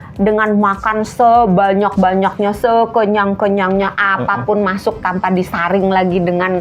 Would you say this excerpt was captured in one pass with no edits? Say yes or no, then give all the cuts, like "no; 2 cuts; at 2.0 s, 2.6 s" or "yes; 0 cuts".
yes; 0 cuts